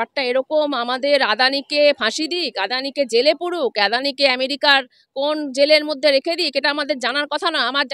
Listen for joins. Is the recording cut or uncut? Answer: uncut